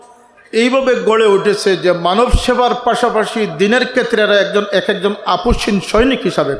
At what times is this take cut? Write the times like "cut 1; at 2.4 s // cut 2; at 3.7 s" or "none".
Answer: none

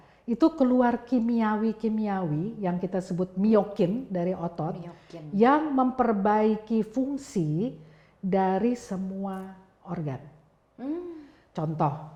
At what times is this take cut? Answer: none

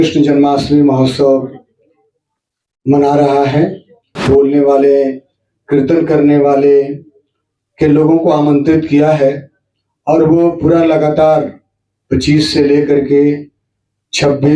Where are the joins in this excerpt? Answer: cut 1; at 4.2 s

